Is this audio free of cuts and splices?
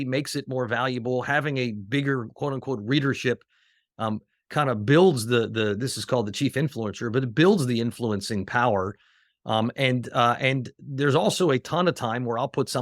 yes; 0 cuts

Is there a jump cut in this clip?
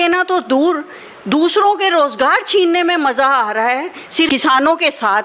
yes; 1 cut; at 4.3 s

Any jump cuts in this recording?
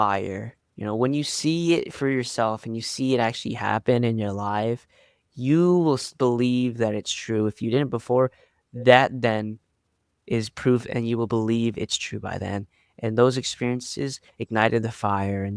no; 0 cuts

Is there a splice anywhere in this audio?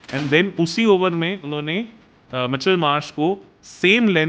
no; 0 cuts

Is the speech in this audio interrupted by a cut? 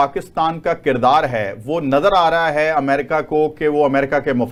no; 0 cuts

